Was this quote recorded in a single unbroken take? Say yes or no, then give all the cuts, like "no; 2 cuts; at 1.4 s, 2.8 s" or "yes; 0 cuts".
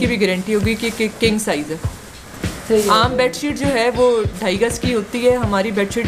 yes; 0 cuts